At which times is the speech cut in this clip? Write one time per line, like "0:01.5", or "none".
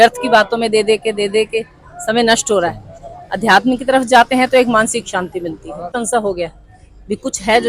0:06.0

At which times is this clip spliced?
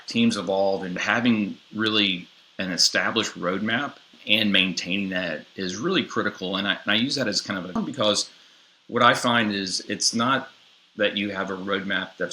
0:01.0
0:04.2
0:07.8

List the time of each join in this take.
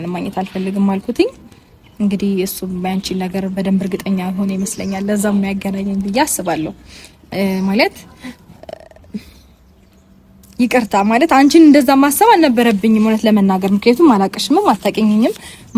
none

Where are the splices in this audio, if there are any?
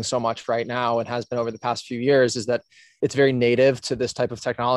0:03.0

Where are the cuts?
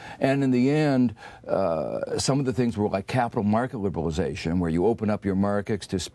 none

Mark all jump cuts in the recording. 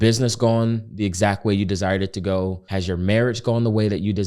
0:02.6

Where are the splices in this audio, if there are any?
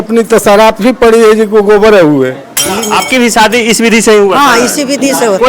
0:02.7

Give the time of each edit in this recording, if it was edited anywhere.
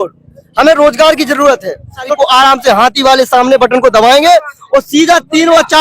0:02.1

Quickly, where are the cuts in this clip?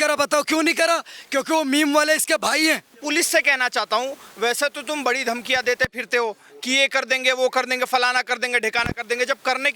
0:03.0

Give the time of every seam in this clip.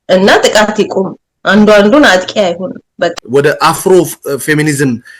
0:03.2

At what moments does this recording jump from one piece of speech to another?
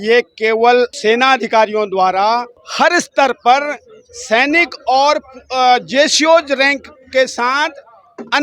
0:01.0
0:02.6

